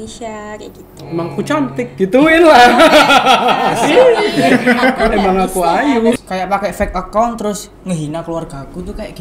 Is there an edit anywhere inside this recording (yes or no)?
yes